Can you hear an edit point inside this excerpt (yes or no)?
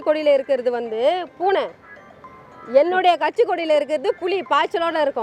no